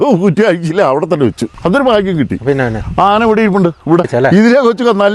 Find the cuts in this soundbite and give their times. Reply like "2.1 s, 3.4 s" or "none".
1.5 s, 4.1 s